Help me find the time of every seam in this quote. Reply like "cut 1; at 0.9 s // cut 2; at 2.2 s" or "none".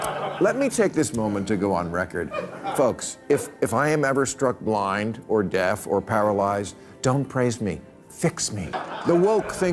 cut 1; at 8.7 s